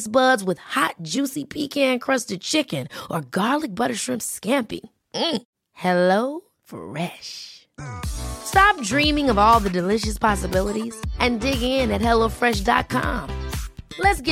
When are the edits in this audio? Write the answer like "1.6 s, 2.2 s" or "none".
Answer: none